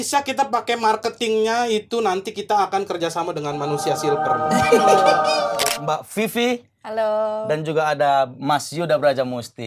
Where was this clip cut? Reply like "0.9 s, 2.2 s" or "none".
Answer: 5.5 s